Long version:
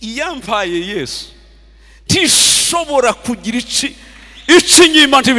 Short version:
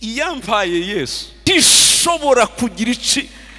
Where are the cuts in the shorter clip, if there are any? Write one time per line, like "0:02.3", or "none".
0:01.5